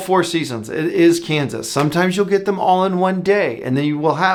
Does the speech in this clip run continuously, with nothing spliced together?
yes; 0 cuts

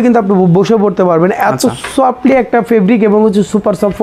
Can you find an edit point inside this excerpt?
no; 0 cuts

